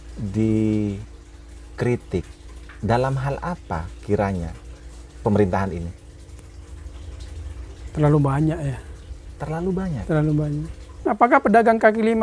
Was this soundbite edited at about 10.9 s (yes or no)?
yes